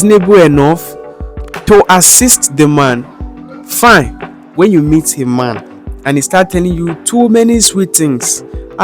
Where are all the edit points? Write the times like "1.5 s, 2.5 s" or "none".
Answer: 4.4 s

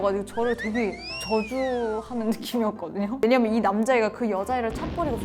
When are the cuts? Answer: 3.2 s

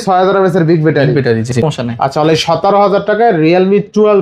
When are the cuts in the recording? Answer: 1.6 s

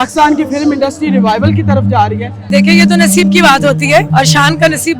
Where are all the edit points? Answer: 2.5 s, 4.1 s

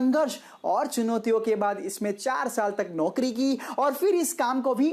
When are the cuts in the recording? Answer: none

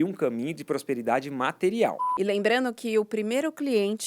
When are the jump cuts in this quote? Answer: 2.0 s

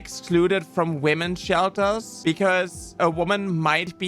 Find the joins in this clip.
2.1 s, 3.0 s

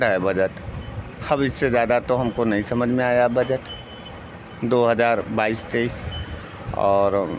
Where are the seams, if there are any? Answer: none

